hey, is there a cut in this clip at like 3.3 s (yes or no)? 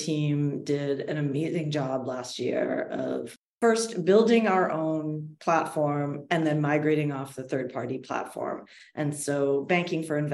yes